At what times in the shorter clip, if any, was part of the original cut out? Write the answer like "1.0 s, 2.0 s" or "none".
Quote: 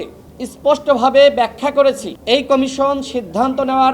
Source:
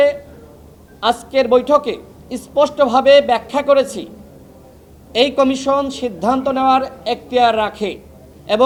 2.1 s